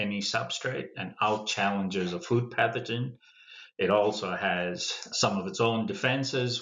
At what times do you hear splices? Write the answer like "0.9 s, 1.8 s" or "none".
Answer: 5.1 s